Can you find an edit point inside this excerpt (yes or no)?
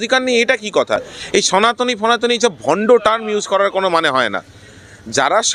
no